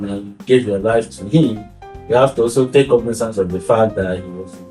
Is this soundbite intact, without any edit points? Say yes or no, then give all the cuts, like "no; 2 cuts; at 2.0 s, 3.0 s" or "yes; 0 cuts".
yes; 0 cuts